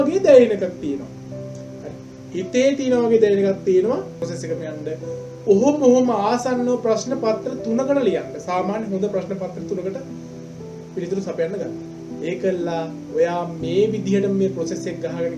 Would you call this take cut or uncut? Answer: cut